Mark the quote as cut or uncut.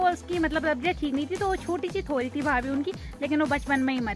uncut